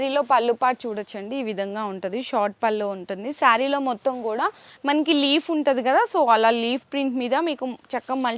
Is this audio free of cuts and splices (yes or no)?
yes